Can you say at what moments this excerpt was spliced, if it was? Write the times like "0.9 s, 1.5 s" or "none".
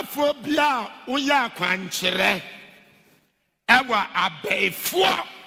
none